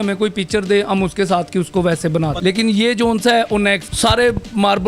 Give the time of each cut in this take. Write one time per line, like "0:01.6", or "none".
0:02.3
0:03.9